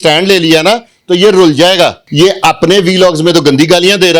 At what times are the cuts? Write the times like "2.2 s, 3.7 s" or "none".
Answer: 2.0 s